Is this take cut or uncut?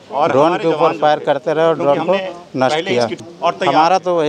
cut